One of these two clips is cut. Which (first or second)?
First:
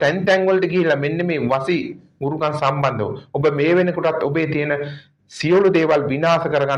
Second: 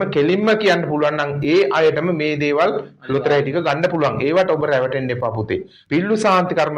second